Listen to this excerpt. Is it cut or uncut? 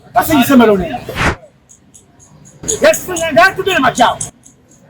cut